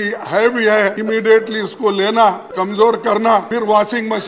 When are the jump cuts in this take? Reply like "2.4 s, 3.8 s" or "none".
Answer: 1.0 s, 2.5 s, 3.5 s